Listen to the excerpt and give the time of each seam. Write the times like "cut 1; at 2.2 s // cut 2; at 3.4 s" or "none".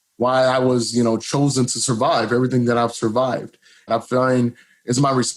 cut 1; at 3.9 s